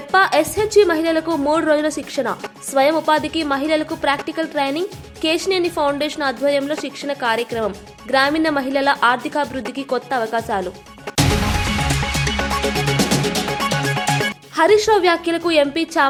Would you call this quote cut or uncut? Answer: uncut